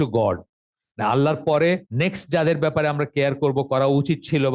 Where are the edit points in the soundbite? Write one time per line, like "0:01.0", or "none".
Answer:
0:01.9